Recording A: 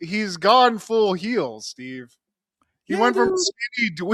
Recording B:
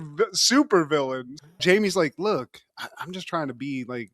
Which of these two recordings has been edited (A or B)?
B